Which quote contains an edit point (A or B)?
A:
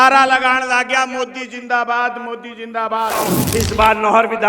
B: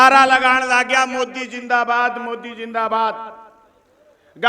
A